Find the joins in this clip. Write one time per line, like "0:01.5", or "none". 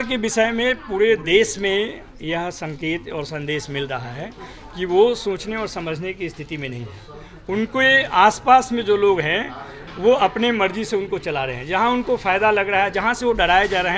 none

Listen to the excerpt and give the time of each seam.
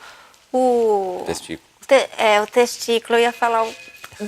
none

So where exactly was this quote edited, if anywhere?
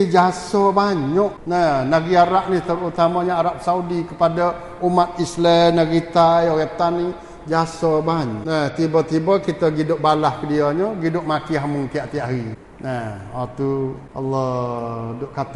0:01.4
0:08.4
0:12.6
0:14.0

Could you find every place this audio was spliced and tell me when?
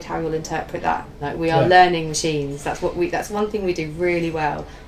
0:01.2

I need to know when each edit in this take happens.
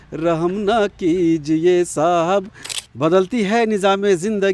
0:02.6

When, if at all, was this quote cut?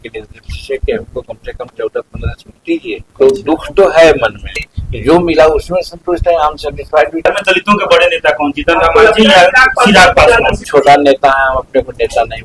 0:03.0
0:04.7
0:07.3
0:10.6

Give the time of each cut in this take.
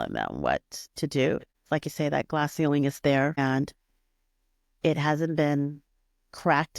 0:01.6
0:03.4

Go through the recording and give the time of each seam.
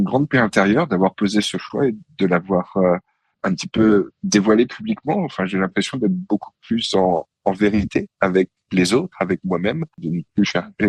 0:10.0

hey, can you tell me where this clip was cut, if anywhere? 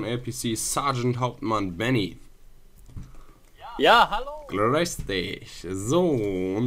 none

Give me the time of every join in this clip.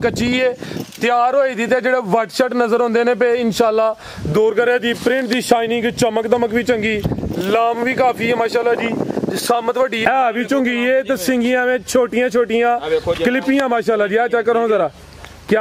0:10.0

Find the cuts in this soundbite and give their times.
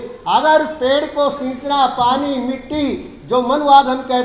none

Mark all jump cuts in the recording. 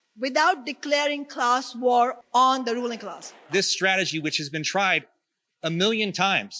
0:02.2
0:03.4

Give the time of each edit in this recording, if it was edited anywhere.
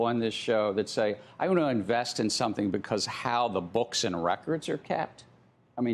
none

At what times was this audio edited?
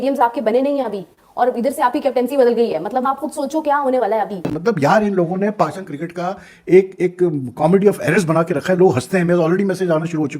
0:04.5

